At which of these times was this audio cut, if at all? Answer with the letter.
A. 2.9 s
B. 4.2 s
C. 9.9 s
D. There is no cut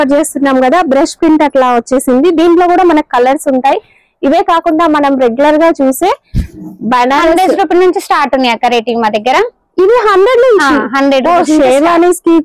D